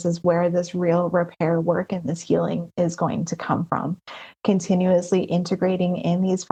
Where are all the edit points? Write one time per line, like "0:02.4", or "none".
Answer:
none